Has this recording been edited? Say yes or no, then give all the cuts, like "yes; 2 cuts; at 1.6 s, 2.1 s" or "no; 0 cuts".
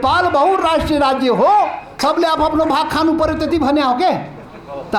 yes; 1 cut; at 1.9 s